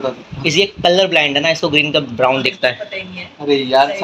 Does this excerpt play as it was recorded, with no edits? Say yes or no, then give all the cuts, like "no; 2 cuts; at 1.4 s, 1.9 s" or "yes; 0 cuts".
yes; 0 cuts